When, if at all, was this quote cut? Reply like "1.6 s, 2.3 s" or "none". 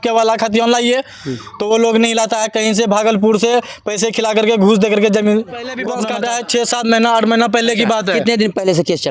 5.9 s